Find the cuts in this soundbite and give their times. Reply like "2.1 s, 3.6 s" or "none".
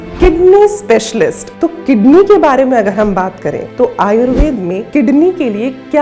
1.4 s, 3.6 s, 4.8 s